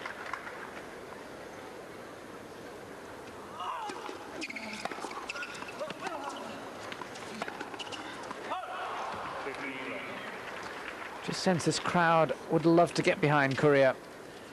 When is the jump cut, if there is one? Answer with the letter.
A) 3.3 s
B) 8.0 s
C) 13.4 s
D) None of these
C